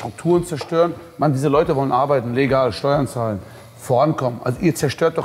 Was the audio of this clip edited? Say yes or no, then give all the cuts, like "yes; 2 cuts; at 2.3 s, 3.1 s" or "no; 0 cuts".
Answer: no; 0 cuts